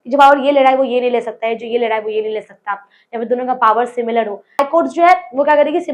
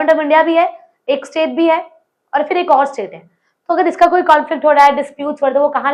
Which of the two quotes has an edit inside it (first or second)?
first